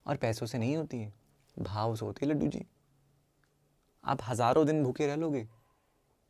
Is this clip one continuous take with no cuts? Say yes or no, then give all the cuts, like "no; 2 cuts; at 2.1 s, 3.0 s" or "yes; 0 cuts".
yes; 0 cuts